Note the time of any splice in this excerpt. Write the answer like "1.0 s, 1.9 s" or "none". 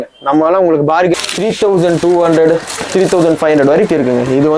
1.1 s